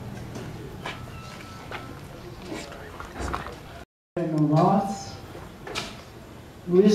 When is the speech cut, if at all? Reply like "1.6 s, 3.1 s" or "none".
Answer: 4.0 s